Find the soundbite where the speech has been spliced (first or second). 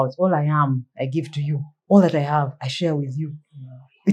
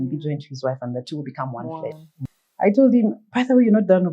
second